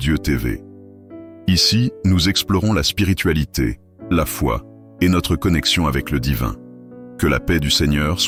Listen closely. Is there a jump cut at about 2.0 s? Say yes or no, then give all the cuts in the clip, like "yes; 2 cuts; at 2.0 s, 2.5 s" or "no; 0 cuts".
no; 0 cuts